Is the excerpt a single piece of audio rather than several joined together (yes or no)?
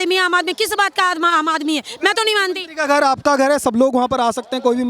yes